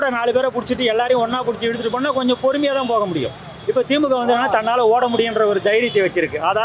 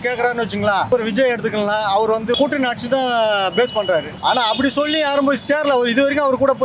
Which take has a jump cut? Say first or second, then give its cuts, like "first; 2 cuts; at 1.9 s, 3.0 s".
second; 3 cuts; at 0.9 s, 2.4 s, 4.1 s